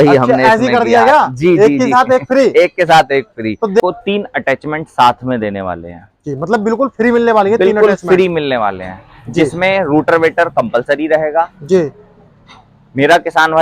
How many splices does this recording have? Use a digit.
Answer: 1